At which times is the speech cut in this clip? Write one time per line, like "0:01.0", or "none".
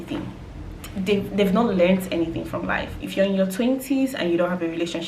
0:03.0